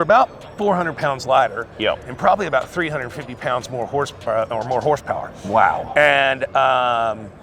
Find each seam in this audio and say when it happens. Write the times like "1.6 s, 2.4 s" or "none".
none

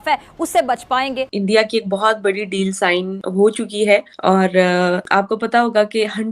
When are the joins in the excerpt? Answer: 1.4 s, 3.2 s, 4.1 s, 5.0 s

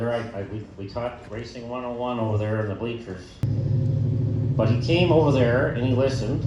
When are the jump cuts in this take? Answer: 3.4 s

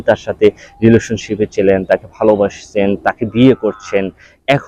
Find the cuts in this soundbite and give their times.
none

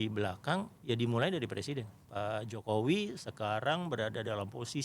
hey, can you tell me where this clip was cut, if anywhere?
2.0 s

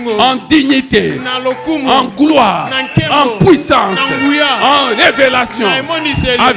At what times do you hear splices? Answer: none

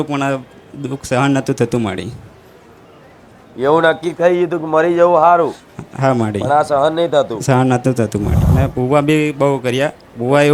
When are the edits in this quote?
8.4 s

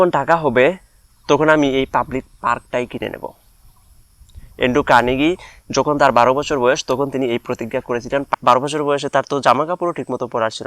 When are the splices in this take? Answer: 8.3 s

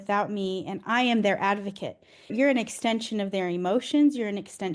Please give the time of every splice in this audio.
2.3 s

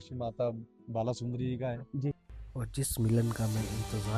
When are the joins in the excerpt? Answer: 2.3 s

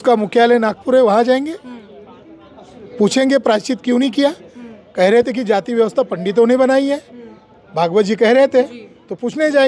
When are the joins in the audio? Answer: none

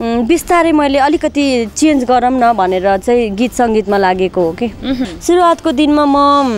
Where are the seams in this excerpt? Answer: 5.1 s

